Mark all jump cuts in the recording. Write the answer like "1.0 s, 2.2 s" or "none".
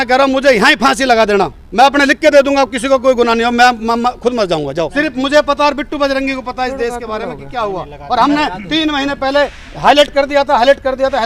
4.9 s